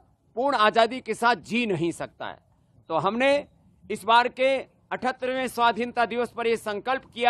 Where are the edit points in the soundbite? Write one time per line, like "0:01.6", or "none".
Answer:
none